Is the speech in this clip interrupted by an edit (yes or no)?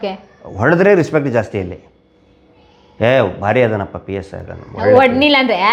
no